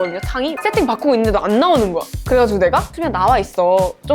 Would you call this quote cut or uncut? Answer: uncut